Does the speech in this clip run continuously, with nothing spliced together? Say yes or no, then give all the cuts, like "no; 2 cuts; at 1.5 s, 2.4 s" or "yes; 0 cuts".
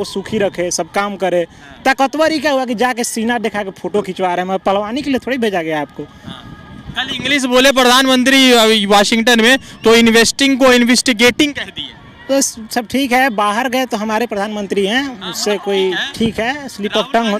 yes; 0 cuts